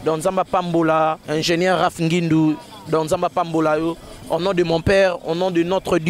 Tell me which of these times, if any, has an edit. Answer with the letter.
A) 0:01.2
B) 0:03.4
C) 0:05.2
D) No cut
A